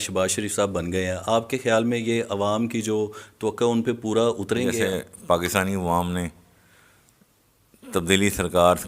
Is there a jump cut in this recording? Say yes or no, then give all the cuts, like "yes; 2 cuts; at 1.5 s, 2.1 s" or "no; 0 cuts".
yes; 1 cut; at 4.8 s